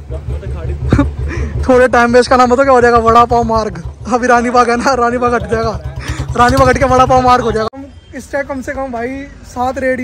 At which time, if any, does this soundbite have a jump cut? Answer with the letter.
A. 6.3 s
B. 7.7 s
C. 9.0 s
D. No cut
B